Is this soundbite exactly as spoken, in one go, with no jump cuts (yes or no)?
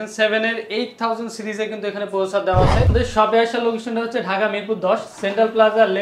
no